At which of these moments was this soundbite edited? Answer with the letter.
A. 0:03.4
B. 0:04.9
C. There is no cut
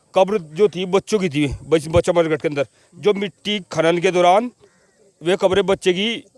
C